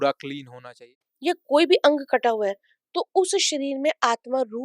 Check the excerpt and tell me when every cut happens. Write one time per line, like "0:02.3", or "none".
0:00.9